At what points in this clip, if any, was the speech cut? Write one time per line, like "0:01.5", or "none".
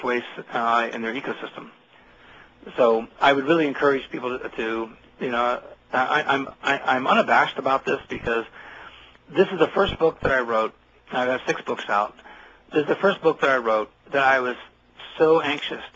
0:09.7

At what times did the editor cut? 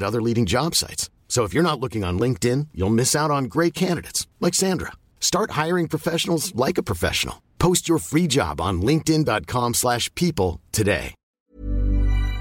0:11.3

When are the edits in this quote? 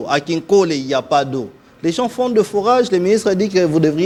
none

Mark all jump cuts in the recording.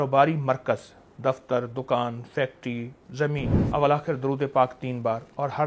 0:03.5

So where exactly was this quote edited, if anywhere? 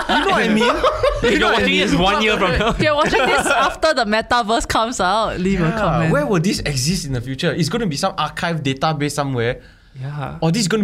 0:02.8

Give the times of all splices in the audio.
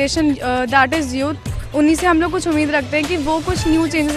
none

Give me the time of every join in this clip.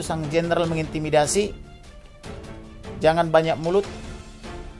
0:03.9

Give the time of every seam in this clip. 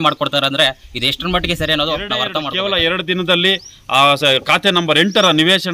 0:02.4

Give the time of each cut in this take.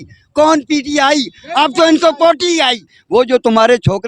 0:02.9

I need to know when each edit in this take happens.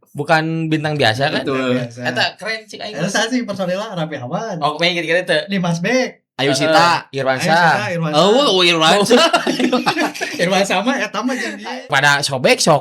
0:11.7

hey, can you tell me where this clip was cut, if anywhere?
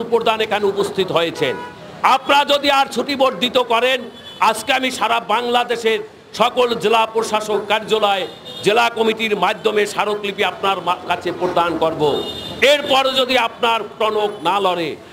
none

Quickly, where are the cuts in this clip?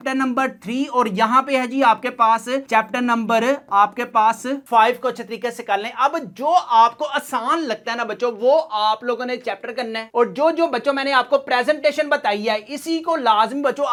none

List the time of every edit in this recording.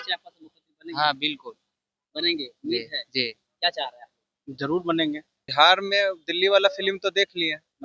0:05.4

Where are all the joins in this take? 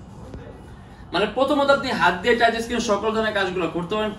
none

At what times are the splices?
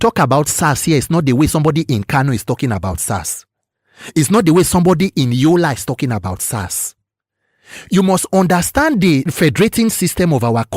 0:09.3

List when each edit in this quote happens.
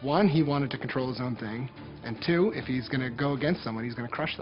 none

